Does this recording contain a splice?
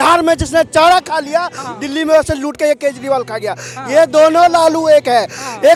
no; 0 cuts

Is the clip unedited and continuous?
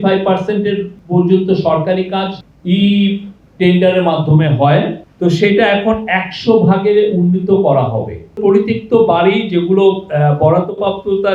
no; 4 cuts; at 0.9 s, 2.3 s, 5.0 s, 8.4 s

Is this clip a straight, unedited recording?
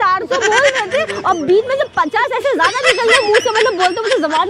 yes; 0 cuts

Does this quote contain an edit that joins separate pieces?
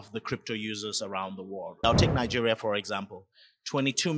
yes; 1 cut; at 1.8 s

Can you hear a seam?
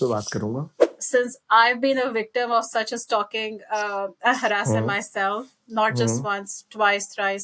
yes; 1 cut; at 0.9 s

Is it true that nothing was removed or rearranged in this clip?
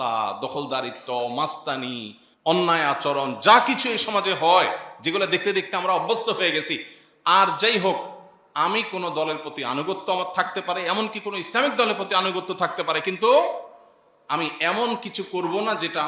yes; 0 cuts

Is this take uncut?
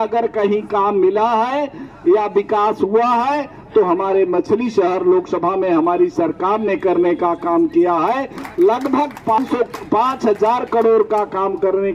yes; 0 cuts

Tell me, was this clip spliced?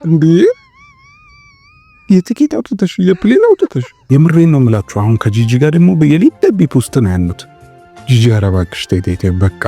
yes; 1 cut; at 3.9 s

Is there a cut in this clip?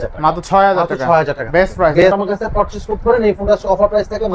yes; 1 cut; at 2.0 s

